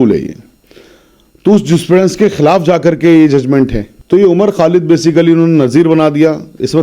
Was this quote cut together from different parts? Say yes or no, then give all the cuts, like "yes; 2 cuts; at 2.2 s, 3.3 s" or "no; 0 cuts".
yes; 1 cut; at 3.9 s